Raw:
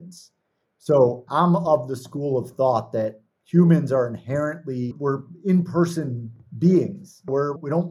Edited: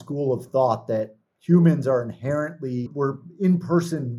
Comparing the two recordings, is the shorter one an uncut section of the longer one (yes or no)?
yes